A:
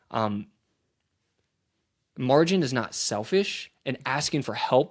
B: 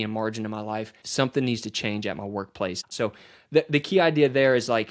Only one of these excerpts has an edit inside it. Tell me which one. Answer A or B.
B